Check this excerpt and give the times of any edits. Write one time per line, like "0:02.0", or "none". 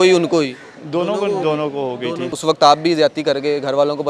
0:02.3